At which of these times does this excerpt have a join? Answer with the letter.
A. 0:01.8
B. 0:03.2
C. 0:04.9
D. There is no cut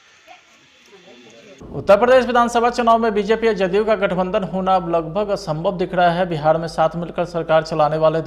A